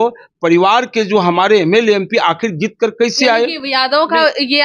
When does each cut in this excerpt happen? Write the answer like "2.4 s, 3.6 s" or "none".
none